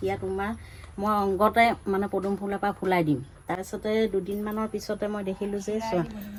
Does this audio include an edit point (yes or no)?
no